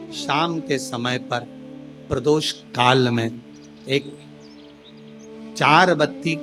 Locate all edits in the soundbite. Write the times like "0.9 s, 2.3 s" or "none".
none